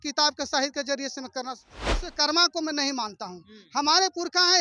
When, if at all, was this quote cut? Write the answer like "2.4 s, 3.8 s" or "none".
1.9 s